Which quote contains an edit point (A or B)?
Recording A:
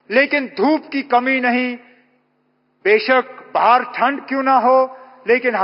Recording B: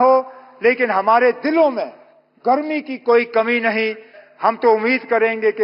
B